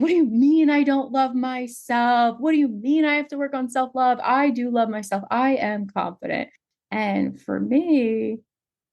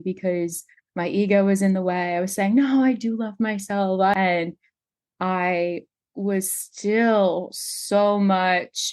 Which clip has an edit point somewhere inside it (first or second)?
second